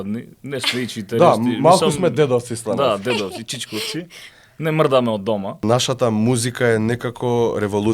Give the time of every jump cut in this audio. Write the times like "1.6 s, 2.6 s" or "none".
5.6 s